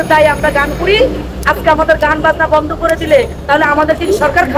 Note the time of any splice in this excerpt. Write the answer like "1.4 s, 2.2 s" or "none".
none